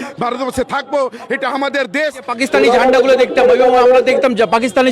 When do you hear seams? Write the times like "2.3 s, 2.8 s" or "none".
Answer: 2.3 s